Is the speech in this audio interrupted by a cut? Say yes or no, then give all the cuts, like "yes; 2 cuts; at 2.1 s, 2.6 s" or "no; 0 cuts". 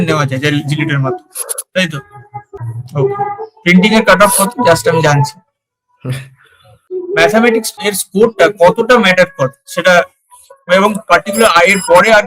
yes; 3 cuts; at 2.6 s, 6.8 s, 7.8 s